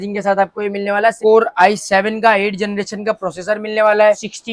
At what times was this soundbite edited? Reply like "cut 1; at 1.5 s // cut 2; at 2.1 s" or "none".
cut 1; at 1.2 s